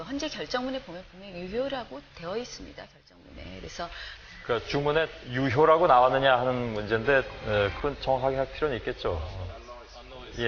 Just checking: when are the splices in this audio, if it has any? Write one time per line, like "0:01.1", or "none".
0:08.3